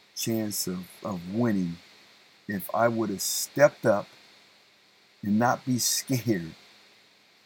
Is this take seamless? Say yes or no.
yes